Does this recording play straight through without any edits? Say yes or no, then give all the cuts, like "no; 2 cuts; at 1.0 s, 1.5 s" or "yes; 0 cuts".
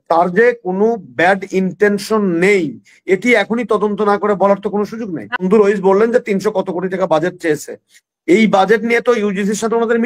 no; 1 cut; at 5.4 s